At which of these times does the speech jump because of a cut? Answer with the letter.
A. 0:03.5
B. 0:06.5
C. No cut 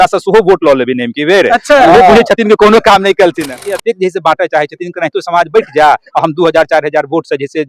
A